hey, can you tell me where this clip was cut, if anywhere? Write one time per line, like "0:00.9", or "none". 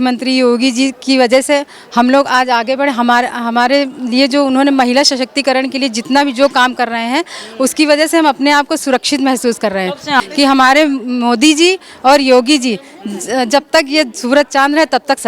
0:10.2